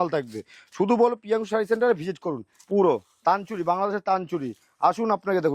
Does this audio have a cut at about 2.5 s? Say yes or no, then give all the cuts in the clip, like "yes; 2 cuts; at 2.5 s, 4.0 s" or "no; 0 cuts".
yes; 1 cut; at 2.5 s